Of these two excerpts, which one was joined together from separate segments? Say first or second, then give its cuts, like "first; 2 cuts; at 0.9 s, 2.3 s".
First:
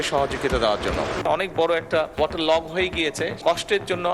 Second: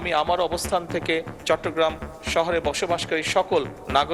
first; 3 cuts; at 1.2 s, 2.2 s, 3.4 s